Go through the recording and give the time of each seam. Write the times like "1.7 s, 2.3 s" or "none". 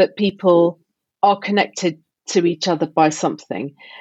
none